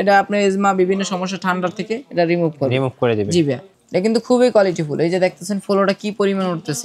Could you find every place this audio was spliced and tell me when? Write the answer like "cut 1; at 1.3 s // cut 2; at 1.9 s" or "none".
cut 1; at 3.7 s